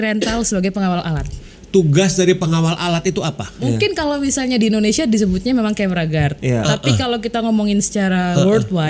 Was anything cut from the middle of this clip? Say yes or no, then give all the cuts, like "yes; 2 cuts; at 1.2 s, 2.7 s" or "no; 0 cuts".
yes; 2 cuts; at 1.5 s, 3.5 s